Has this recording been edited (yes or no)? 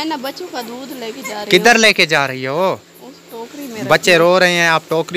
no